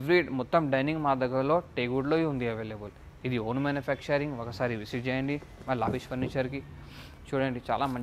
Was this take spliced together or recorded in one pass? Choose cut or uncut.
uncut